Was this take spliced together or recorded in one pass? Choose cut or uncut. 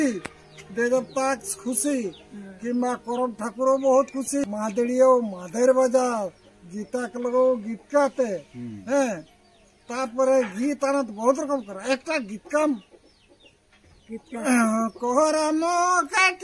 cut